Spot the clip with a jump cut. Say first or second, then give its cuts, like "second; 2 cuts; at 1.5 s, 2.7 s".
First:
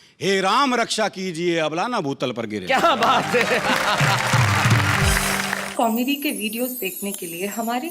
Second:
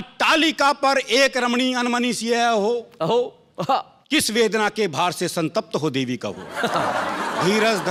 first; 1 cut; at 5.6 s